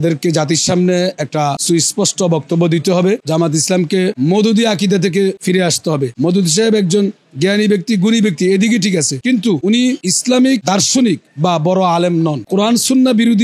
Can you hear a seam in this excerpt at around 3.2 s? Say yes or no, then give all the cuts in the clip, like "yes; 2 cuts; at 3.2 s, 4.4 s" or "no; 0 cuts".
yes; 3 cuts; at 3.2 s, 6.1 s, 12.5 s